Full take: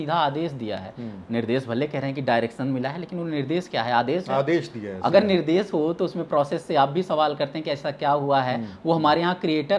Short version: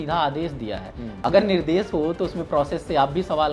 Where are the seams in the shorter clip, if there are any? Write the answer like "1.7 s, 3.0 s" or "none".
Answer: 1.0 s